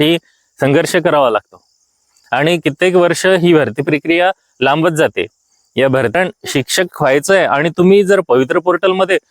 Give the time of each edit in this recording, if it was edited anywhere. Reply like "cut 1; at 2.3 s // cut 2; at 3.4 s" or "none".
cut 1; at 6.1 s